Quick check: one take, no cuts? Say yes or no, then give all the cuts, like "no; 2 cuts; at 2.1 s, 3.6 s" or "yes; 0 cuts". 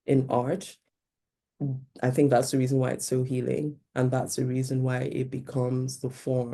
yes; 0 cuts